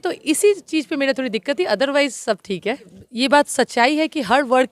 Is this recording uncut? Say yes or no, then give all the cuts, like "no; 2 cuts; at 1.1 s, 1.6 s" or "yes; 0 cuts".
no; 1 cut; at 3.0 s